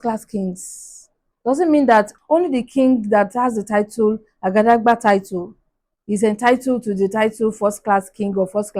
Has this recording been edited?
yes; 1 cut; at 2.1 s

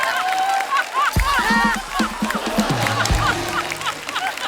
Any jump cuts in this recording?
no; 0 cuts

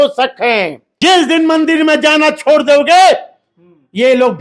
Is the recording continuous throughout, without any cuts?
no; 1 cut; at 1.0 s

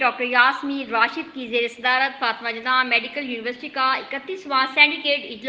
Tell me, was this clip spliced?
no; 0 cuts

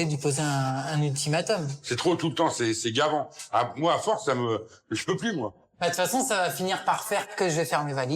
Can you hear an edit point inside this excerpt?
yes; 3 cuts; at 1.7 s, 5.7 s, 7.3 s

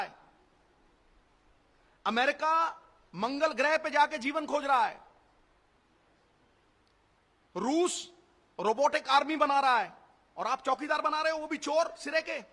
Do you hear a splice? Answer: no; 0 cuts

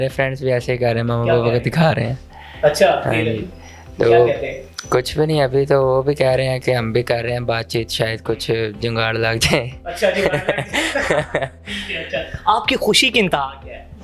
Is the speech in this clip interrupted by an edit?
no; 0 cuts

